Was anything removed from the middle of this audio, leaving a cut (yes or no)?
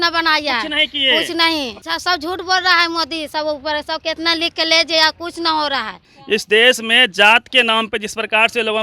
yes